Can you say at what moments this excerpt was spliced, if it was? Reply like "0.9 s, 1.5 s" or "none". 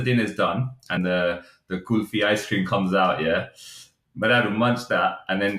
1.0 s